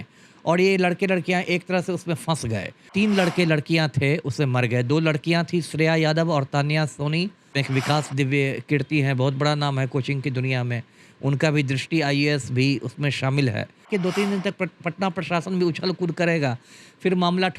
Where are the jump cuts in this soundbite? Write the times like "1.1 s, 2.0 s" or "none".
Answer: 2.9 s, 7.5 s, 13.9 s